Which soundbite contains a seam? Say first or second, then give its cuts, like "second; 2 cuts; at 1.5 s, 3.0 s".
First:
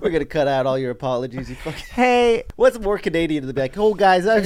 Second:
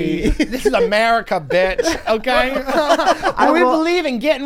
first; 1 cut; at 2.5 s